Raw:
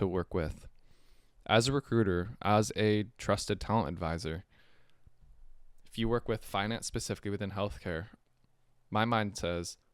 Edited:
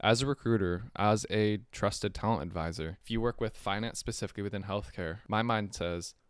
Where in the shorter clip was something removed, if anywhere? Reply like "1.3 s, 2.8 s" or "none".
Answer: 3.0 s, 5.2 s